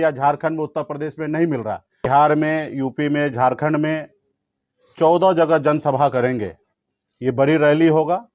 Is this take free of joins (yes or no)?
no